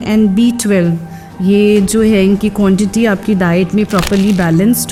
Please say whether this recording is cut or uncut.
uncut